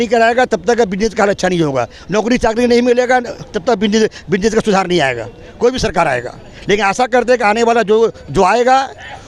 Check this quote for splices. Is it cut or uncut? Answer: uncut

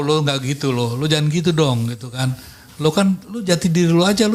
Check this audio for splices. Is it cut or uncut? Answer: uncut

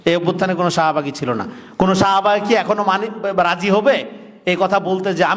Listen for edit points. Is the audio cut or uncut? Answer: uncut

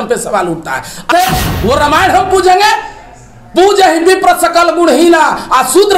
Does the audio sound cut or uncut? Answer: cut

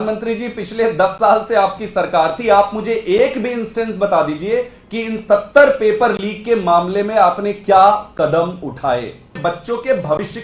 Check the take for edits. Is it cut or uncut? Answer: cut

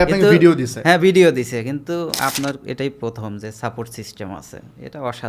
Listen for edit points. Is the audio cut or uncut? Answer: uncut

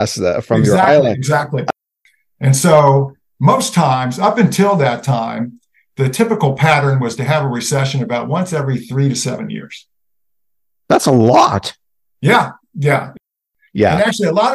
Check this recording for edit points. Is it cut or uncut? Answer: cut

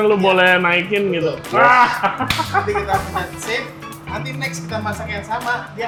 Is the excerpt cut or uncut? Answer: uncut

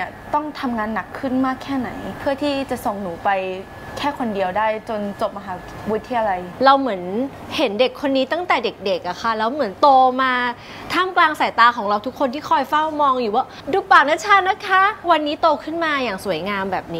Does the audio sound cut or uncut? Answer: cut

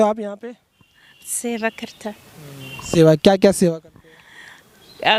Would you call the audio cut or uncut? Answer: uncut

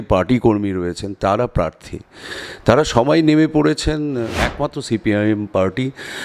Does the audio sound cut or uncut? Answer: cut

